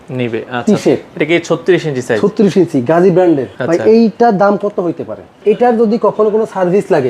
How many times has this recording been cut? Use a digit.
2